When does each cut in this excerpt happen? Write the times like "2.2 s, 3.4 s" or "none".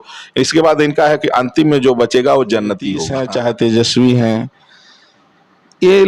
3.1 s